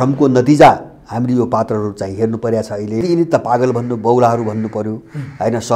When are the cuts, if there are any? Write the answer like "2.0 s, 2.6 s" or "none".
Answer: 3.0 s